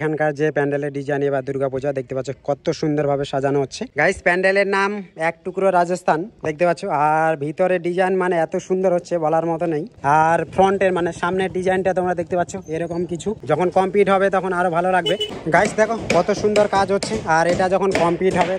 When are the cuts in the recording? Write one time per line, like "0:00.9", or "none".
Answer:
0:03.8
0:09.9
0:13.4
0:15.4